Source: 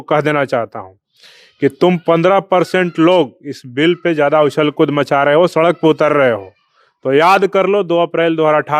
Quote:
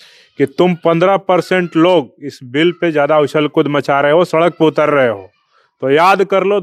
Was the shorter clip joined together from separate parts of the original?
no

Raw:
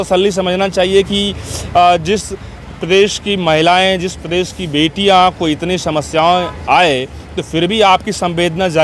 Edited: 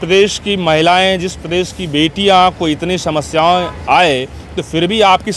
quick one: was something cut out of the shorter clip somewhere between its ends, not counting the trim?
no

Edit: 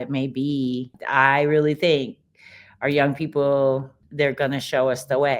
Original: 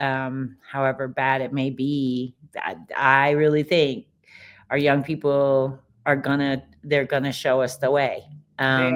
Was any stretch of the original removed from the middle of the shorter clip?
yes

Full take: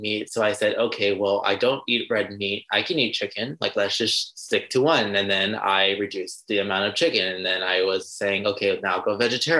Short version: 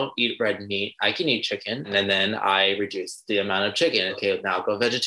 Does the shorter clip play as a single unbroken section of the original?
no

